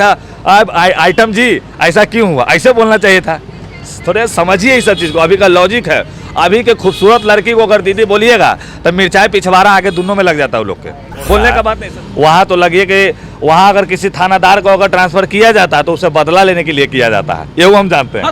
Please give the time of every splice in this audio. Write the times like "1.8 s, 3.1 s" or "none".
11.9 s